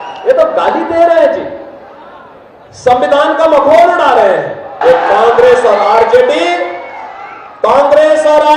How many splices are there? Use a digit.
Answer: 1